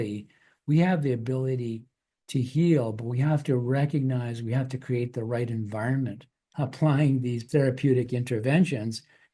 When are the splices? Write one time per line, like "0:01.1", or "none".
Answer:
0:06.5
0:07.4